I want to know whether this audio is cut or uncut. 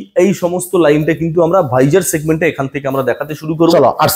uncut